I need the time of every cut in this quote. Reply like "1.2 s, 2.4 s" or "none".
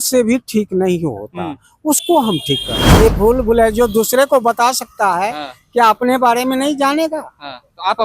2.8 s